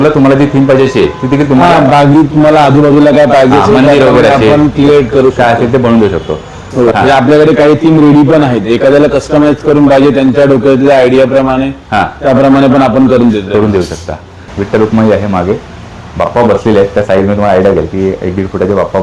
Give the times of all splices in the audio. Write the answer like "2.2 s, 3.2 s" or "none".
6.9 s, 14.4 s